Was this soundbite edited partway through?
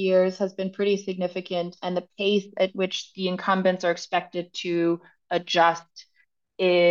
no; 0 cuts

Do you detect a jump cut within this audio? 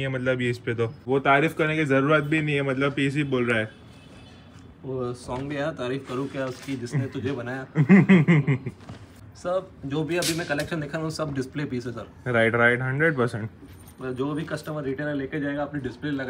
yes; 2 cuts; at 1.0 s, 9.3 s

